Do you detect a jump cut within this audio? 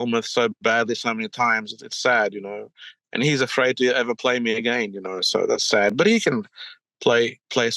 no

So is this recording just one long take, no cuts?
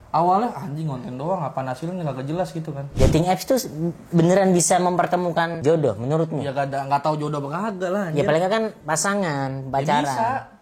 no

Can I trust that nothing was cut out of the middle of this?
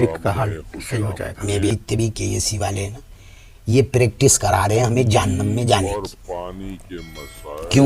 no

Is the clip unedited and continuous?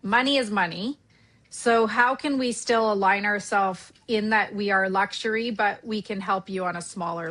yes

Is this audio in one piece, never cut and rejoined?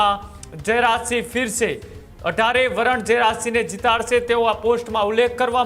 yes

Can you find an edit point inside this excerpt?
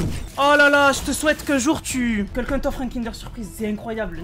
yes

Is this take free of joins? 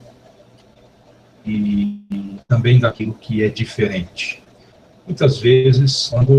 no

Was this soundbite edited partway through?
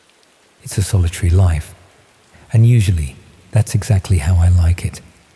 no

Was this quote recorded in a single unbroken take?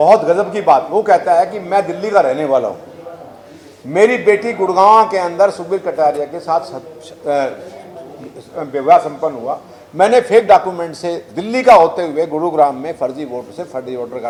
yes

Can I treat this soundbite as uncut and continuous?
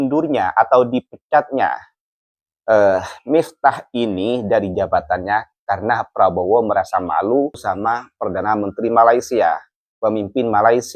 yes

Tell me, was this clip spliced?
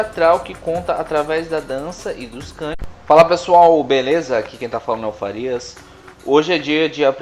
no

